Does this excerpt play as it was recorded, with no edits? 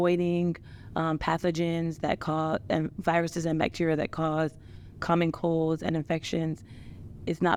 yes; 0 cuts

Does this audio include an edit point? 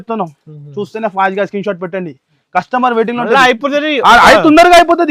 no; 0 cuts

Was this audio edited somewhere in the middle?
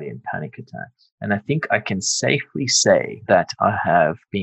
no; 0 cuts

